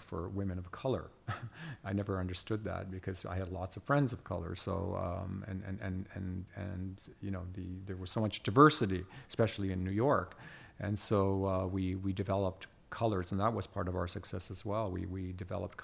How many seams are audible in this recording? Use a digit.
0